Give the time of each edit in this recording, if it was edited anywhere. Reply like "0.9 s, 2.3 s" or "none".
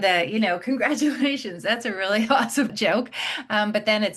2.7 s